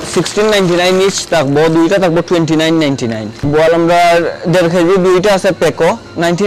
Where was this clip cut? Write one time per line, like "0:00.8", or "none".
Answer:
none